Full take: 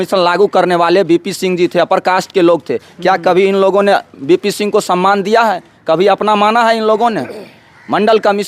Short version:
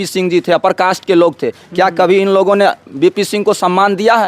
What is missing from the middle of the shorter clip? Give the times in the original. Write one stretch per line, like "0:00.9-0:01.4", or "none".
none